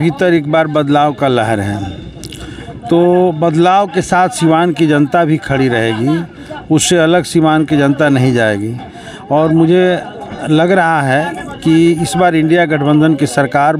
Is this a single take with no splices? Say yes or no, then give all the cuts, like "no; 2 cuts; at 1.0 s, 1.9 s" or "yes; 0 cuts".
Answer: yes; 0 cuts